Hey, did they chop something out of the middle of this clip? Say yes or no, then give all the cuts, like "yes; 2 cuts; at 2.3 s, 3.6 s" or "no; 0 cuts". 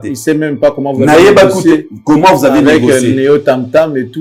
no; 0 cuts